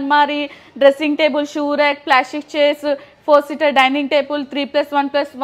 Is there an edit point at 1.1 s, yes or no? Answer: no